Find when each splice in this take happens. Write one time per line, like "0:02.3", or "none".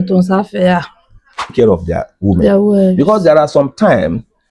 0:01.5